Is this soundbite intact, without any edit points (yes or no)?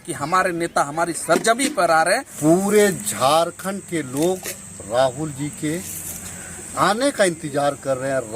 no